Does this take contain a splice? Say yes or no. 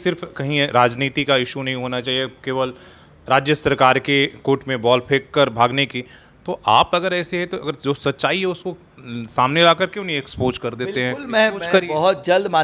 no